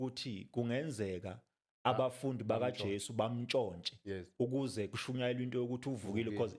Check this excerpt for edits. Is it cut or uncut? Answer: uncut